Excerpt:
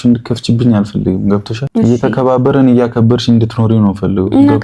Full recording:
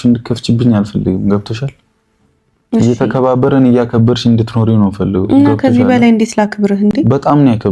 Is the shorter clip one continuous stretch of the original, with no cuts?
no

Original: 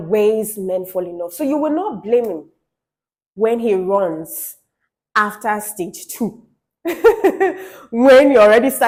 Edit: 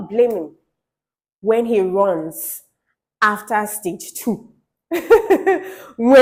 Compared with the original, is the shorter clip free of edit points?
yes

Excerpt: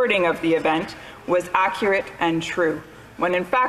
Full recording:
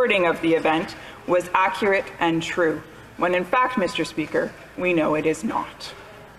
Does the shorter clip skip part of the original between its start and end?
no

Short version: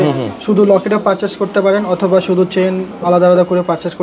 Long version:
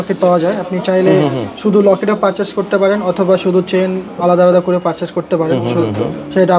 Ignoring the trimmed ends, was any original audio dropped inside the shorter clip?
no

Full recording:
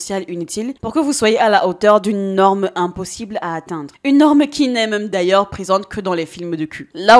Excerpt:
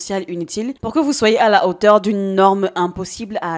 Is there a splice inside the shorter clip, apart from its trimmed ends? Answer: no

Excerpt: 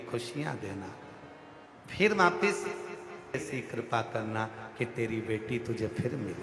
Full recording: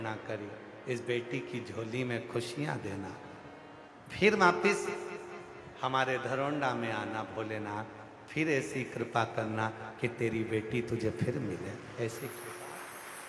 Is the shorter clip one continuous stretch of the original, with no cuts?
no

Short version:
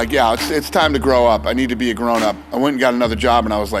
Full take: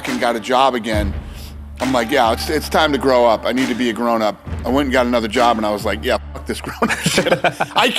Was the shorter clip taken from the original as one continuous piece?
no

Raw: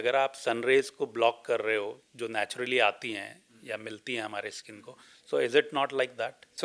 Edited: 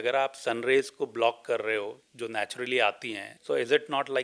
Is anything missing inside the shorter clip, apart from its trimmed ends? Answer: yes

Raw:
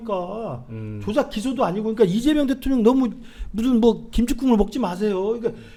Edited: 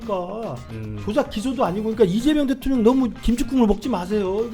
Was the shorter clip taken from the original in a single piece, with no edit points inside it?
no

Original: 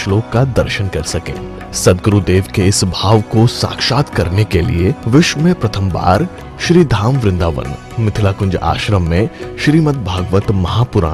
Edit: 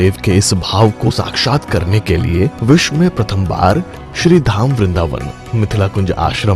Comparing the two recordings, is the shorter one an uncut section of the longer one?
no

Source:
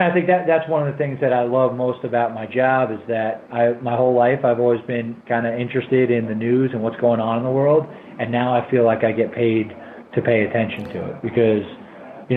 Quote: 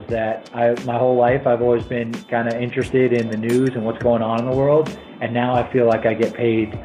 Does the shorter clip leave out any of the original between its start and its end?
no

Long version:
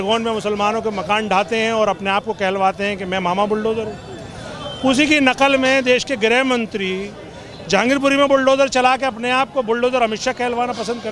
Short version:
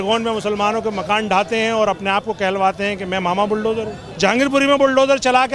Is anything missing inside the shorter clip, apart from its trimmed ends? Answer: yes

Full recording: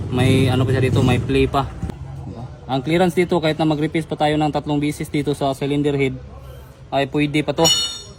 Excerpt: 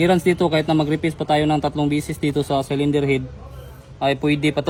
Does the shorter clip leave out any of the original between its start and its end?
no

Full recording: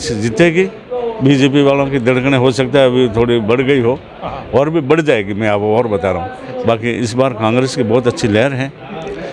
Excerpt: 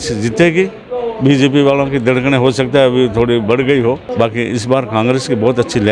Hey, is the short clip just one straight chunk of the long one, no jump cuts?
no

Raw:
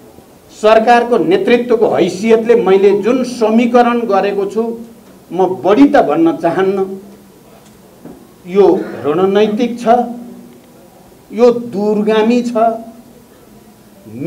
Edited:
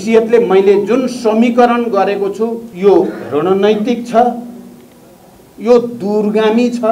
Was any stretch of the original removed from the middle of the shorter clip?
yes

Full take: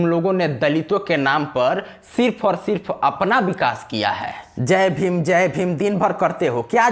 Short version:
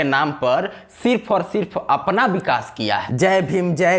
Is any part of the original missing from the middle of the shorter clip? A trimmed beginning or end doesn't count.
yes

